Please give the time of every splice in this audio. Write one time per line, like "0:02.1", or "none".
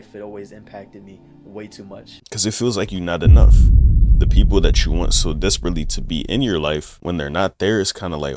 0:02.1
0:06.9